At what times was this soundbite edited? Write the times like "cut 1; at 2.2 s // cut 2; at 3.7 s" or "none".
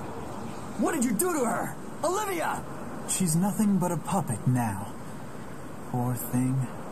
cut 1; at 4.1 s